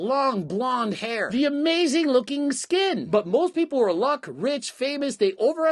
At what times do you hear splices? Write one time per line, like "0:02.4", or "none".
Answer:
0:03.0